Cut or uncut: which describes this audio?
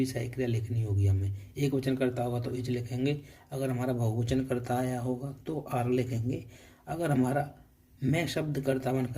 uncut